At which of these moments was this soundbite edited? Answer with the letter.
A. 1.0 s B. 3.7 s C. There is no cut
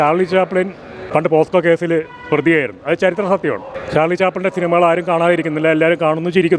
B